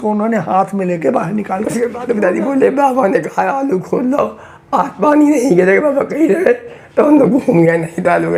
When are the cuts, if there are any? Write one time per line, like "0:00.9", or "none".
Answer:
0:02.0